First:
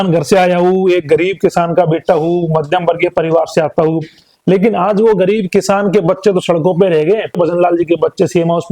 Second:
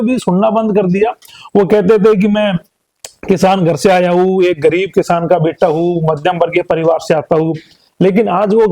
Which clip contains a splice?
first; 1 cut; at 7.4 s

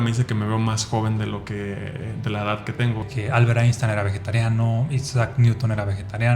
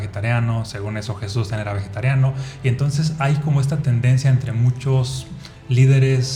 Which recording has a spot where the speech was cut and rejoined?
first; 1 cut; at 3.1 s

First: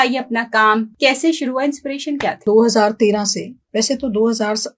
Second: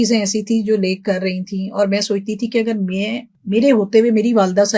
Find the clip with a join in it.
first; 2 cuts; at 0.9 s, 2.4 s

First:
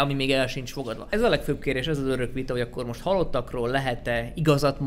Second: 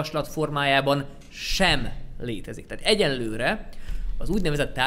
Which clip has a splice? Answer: first; 1 cut; at 0.9 s

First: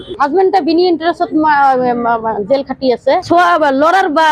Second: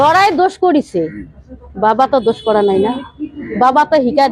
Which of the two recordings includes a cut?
first; 1 cut; at 3.2 s

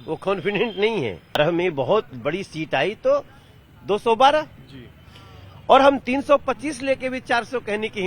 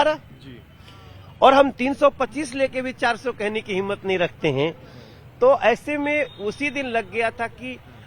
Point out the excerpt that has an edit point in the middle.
first; 1 cut; at 1.4 s

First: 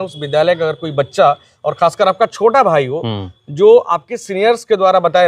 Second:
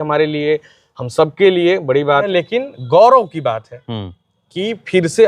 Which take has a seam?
second; 1 cut; at 2.3 s

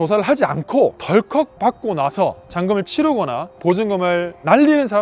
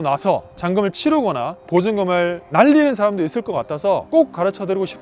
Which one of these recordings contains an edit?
second; 1 cut; at 4.0 s

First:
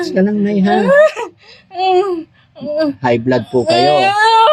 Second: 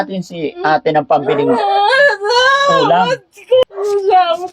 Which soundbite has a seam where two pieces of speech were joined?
second; 1 cut; at 3.6 s

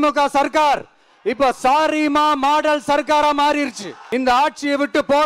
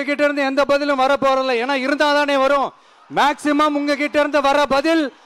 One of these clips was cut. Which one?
first; 1 cut; at 3.9 s

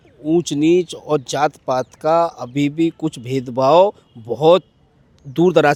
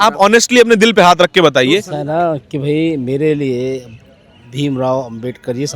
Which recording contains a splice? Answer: second; 1 cut; at 1.9 s

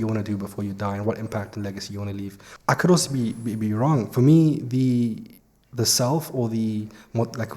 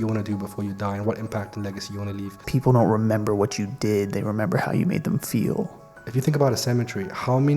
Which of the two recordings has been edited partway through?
second; 2 cuts; at 2.4 s, 5.9 s

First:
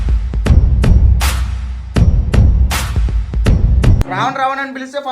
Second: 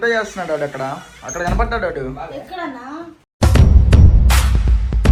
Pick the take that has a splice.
first; 1 cut; at 4.1 s

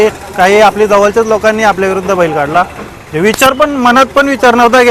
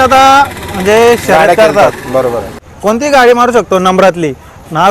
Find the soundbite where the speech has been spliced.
second; 1 cut; at 2.6 s

